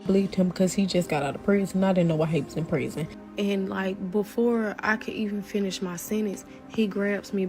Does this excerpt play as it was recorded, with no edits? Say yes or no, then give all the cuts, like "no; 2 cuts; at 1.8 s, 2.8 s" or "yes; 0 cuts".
no; 1 cut; at 3.1 s